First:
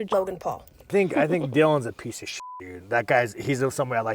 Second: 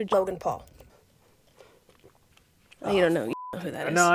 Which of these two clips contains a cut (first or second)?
first